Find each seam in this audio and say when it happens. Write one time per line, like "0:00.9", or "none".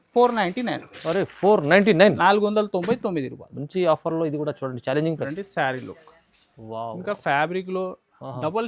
0:05.3